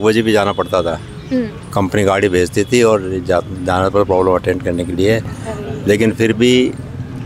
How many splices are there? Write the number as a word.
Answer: zero